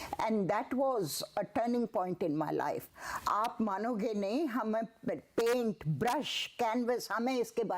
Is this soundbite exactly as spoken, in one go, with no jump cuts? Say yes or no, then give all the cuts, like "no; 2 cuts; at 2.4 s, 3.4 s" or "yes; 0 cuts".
no; 1 cut; at 2.9 s